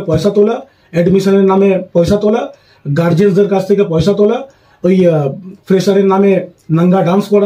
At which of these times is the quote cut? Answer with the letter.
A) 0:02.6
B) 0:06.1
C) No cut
C